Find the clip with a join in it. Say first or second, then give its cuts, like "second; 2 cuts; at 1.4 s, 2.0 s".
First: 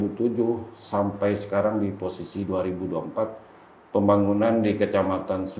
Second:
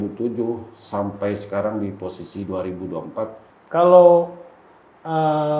second; 1 cut; at 3.5 s